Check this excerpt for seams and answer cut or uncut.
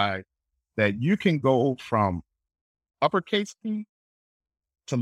uncut